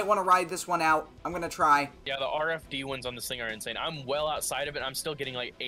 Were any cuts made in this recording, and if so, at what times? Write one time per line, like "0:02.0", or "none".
0:02.0